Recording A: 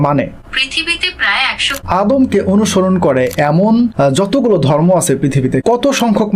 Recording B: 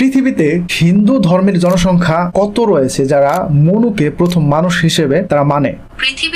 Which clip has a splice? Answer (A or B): A